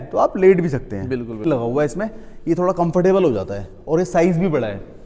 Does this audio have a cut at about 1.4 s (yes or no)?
yes